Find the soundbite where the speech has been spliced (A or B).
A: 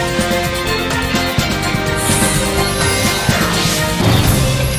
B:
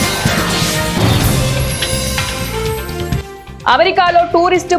B